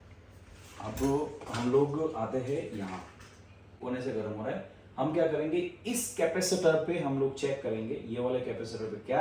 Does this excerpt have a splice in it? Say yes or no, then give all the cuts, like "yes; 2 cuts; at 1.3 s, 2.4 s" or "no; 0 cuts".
yes; 1 cut; at 3.7 s